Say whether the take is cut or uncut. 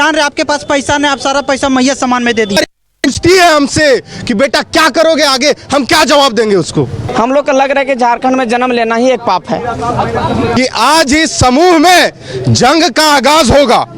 cut